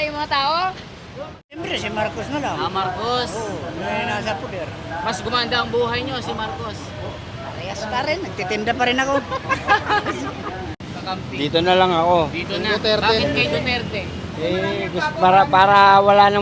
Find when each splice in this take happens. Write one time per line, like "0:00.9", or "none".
0:01.6
0:10.7